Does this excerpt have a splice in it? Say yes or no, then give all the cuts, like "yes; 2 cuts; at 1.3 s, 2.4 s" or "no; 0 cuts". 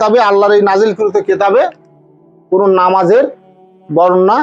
no; 0 cuts